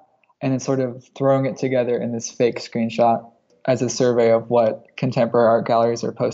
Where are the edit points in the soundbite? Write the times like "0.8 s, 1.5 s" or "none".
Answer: none